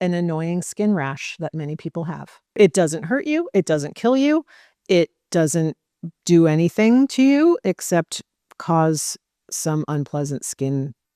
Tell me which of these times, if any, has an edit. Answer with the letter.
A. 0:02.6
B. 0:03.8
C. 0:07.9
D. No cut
A